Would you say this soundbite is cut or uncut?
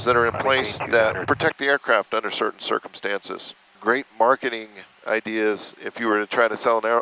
cut